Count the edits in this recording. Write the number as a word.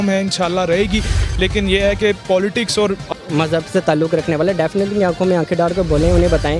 one